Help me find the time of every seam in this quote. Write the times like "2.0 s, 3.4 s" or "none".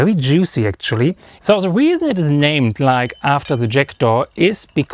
1.3 s